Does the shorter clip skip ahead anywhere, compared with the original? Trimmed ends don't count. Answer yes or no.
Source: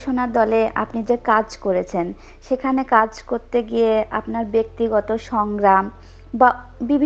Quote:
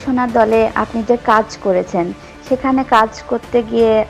no